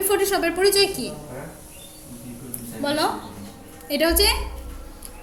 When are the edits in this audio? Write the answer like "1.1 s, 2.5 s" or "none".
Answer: none